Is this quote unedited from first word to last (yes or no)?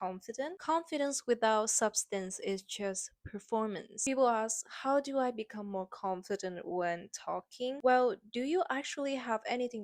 no